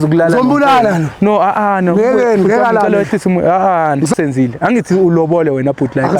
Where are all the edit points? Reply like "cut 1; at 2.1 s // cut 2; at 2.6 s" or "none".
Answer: cut 1; at 4.1 s